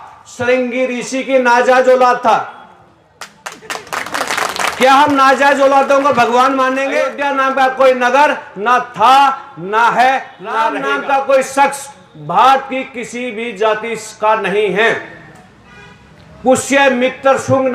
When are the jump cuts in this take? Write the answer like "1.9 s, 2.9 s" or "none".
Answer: 7.1 s, 10.8 s